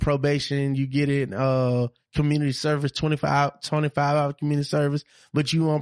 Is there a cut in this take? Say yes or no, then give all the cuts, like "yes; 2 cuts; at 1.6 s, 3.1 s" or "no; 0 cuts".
no; 0 cuts